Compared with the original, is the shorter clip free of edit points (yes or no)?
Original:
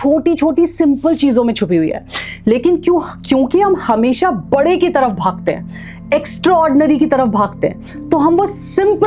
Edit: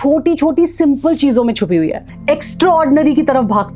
no